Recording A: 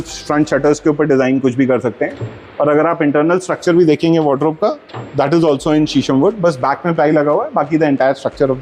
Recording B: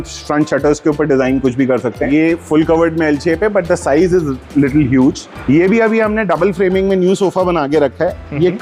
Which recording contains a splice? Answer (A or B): B